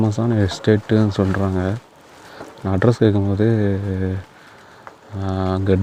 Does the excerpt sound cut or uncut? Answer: uncut